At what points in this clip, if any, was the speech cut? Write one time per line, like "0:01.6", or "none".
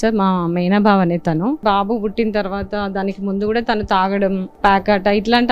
0:01.6
0:04.5

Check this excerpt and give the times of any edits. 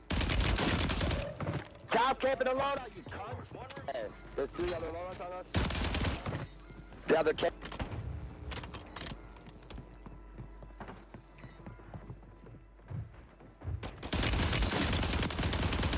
0:03.9

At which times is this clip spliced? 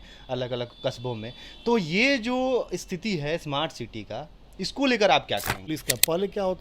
0:05.6

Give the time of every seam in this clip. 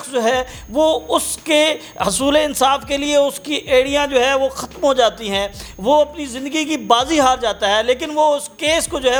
none

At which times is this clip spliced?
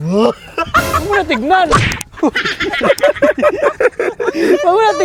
none

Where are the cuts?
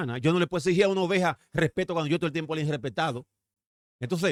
none

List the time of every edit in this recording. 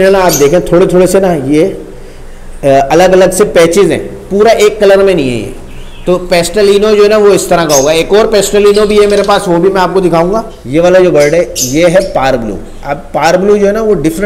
0:10.5

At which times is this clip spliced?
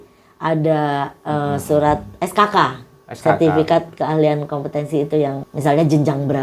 0:05.5

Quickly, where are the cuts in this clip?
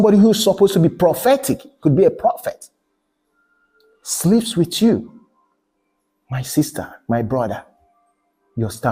none

